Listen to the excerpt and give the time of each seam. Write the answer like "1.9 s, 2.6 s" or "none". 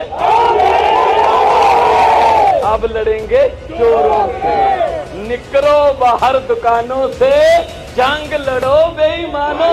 none